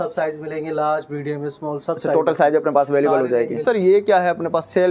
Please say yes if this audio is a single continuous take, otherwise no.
no